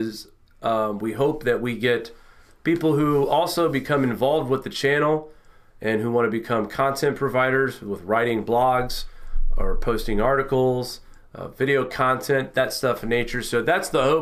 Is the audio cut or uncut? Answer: uncut